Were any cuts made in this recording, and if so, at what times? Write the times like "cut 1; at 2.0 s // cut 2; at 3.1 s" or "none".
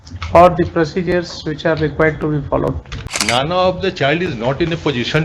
cut 1; at 3.3 s